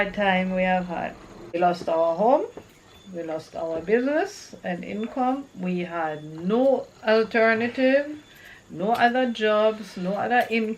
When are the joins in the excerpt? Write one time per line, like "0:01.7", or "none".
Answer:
0:01.6